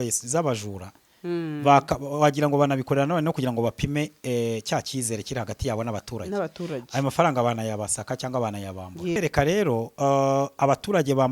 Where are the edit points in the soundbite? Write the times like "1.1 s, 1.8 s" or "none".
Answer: 9.2 s